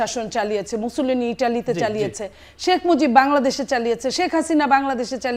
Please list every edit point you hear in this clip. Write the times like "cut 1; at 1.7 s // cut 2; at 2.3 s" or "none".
none